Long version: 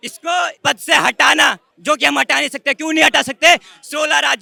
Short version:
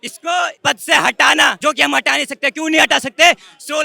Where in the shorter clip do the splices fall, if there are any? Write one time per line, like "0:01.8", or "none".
0:01.6